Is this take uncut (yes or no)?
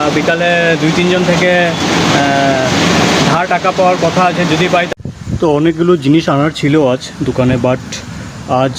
no